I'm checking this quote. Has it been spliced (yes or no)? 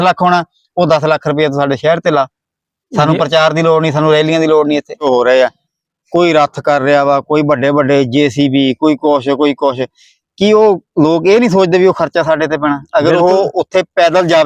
yes